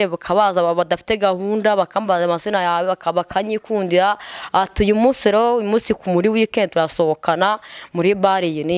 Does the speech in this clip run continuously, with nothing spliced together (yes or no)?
yes